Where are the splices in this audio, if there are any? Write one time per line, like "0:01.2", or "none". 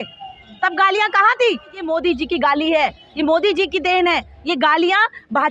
0:01.9